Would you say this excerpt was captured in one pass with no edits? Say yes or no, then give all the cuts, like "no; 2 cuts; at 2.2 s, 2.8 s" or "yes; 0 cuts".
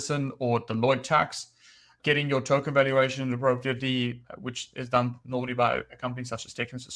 yes; 0 cuts